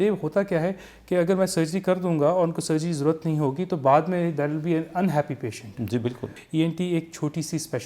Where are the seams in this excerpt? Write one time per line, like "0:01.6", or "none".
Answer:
0:06.3